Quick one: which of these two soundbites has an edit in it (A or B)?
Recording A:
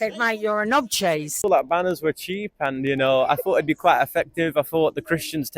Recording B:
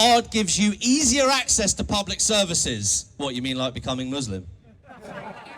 A